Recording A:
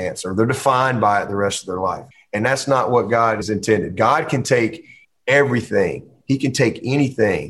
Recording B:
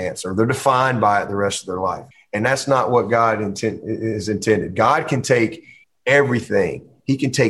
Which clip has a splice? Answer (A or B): A